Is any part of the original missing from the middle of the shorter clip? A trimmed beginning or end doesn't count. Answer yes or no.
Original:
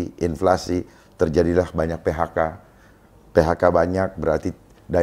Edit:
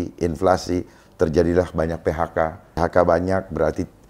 yes